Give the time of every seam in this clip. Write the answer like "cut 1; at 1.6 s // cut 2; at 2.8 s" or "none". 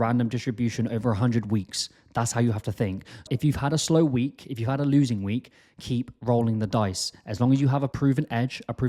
cut 1; at 3.3 s // cut 2; at 7.9 s

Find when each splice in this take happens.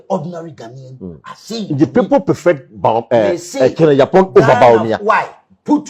none

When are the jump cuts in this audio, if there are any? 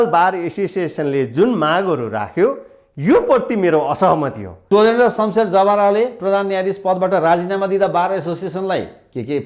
cut 1; at 4.6 s

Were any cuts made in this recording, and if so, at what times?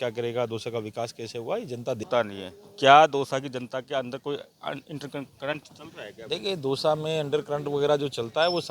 cut 1; at 2.0 s

